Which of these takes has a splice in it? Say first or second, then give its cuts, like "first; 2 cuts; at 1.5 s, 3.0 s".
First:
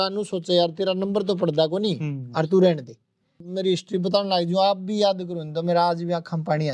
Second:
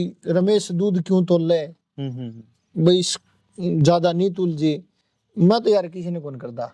first; 1 cut; at 3.4 s